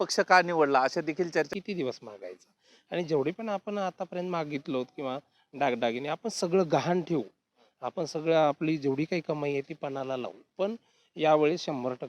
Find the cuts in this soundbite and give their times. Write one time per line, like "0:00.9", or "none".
0:01.5